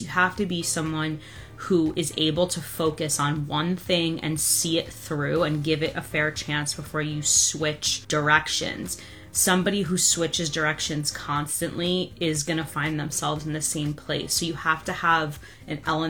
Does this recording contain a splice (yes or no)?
yes